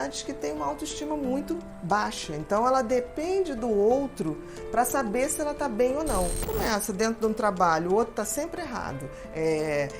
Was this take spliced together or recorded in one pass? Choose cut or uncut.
cut